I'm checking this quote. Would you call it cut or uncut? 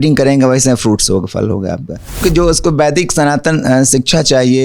cut